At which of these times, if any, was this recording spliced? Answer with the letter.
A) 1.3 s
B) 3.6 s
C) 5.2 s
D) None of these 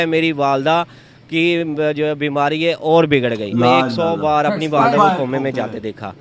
B